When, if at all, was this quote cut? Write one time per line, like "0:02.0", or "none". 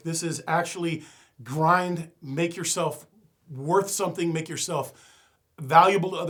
none